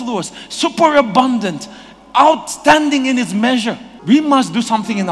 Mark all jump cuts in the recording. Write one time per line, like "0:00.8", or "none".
0:03.9